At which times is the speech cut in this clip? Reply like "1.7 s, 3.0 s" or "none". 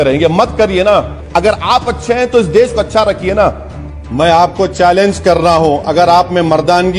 1.2 s, 4.0 s